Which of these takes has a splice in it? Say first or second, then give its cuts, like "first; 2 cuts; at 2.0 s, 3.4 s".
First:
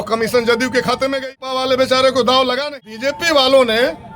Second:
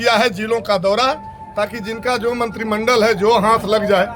first; 2 cuts; at 1.4 s, 2.7 s